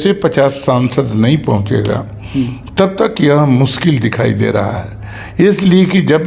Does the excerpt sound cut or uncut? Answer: uncut